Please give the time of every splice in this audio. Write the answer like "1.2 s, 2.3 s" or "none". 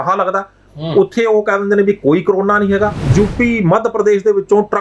3.0 s

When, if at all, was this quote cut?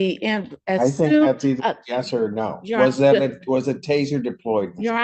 none

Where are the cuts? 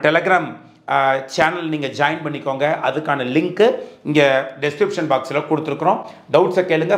none

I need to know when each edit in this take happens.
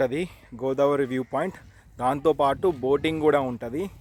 none

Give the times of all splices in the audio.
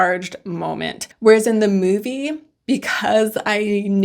1.0 s

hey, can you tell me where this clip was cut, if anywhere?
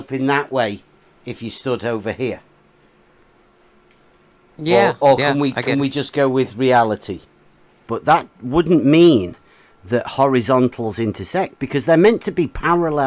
7.9 s

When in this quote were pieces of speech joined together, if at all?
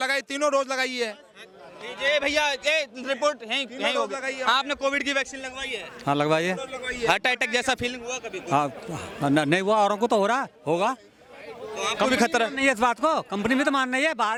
none

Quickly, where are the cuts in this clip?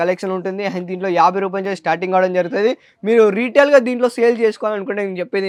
none

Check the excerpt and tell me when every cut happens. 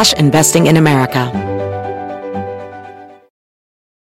1.3 s

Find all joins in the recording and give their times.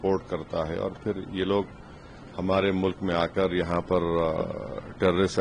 none

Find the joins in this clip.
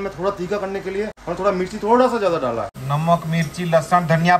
1.2 s, 2.7 s

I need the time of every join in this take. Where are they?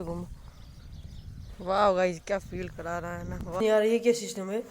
3.6 s

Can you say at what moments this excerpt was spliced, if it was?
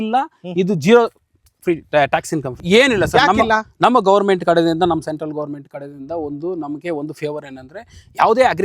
2.6 s

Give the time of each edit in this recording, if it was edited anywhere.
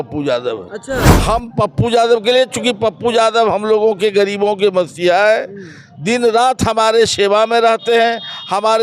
1.0 s

